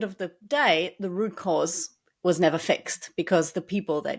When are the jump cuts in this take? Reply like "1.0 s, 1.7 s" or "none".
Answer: none